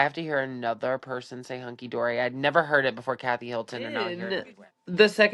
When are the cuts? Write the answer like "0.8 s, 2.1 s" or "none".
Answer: 4.2 s